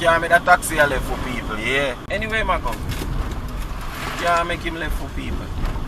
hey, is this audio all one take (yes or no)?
no